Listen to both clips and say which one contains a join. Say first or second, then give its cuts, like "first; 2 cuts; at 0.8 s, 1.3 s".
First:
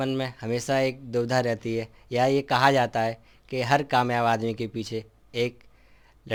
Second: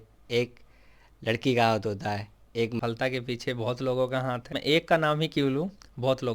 second; 2 cuts; at 2.8 s, 4.5 s